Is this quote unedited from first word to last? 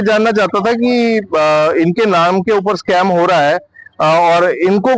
yes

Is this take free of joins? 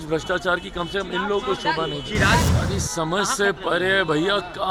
no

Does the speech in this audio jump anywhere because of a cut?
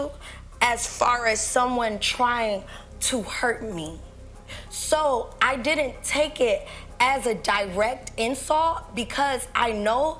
no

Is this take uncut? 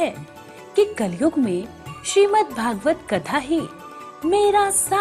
yes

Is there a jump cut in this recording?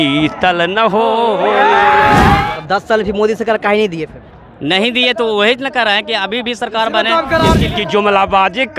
yes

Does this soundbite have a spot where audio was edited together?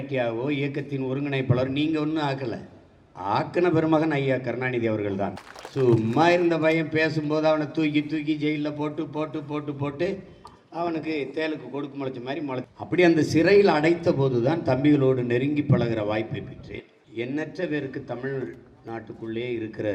no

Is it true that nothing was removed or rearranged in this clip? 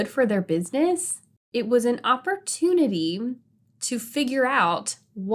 no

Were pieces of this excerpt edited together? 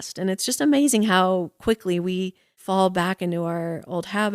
yes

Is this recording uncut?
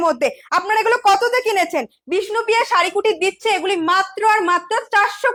yes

